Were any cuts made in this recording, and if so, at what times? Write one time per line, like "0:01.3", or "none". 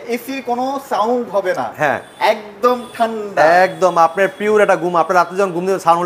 none